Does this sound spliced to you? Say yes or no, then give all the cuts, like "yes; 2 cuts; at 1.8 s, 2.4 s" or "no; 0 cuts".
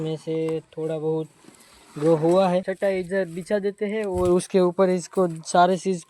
yes; 1 cut; at 2.6 s